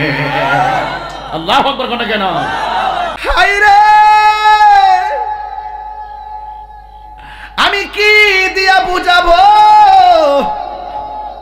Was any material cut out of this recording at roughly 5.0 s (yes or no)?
no